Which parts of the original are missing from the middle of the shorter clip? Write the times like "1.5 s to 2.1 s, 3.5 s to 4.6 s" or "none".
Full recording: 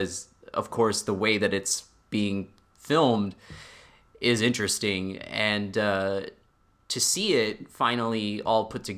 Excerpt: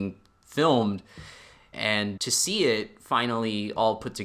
4.0 s to 6.4 s